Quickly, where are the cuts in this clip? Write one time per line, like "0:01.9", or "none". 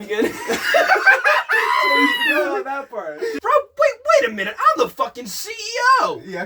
0:03.4